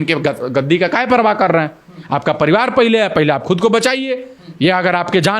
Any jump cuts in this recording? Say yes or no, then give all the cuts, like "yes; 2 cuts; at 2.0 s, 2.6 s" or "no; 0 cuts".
no; 0 cuts